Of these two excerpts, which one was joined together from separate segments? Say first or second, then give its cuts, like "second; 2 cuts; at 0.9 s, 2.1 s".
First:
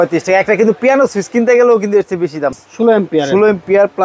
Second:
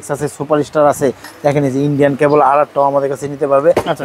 first; 1 cut; at 2.5 s